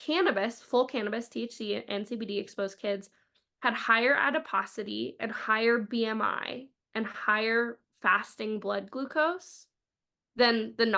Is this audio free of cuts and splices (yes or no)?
yes